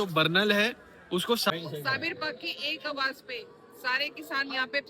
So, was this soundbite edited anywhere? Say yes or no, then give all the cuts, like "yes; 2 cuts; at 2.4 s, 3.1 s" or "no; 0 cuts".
yes; 1 cut; at 1.5 s